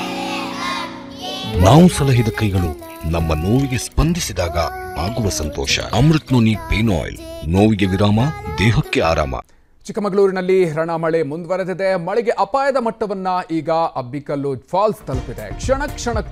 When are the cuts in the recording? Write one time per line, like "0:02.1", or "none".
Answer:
none